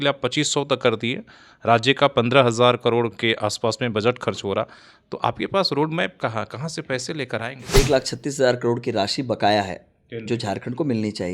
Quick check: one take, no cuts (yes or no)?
no